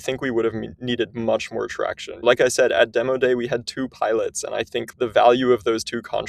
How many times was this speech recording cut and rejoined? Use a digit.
2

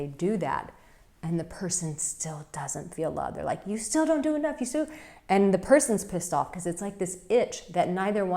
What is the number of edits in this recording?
0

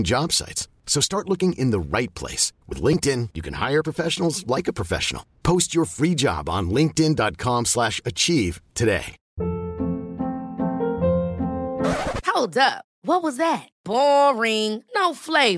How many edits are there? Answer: 1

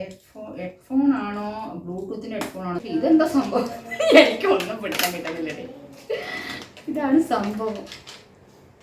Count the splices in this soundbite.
1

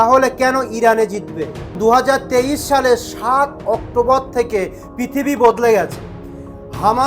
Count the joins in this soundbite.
1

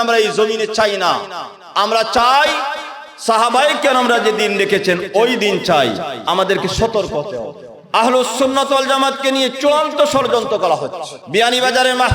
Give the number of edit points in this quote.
2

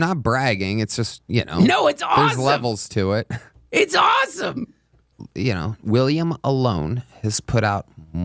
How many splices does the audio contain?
1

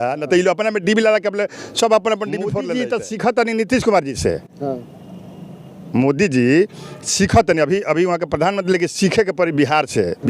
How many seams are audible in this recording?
1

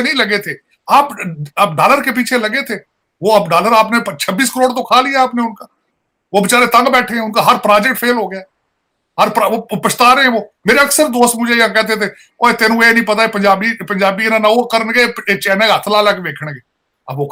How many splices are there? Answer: 0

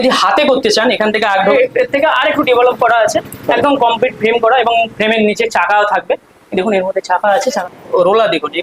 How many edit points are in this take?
2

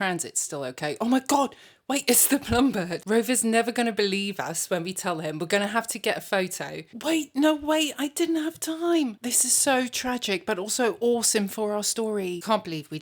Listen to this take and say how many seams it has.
0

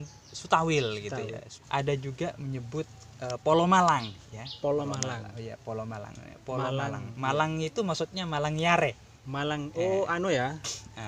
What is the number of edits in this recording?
1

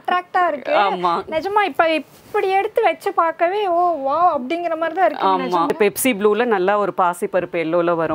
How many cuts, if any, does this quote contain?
1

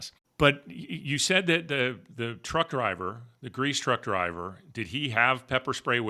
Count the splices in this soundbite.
0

